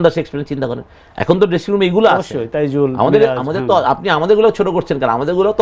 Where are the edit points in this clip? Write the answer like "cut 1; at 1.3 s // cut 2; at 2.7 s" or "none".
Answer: none